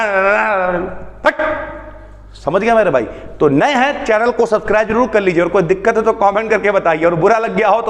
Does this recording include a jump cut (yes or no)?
no